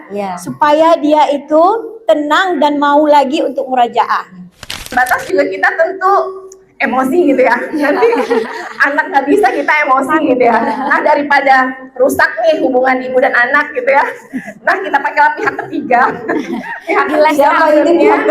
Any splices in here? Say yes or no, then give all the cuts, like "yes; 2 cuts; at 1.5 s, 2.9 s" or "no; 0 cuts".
yes; 1 cut; at 4.8 s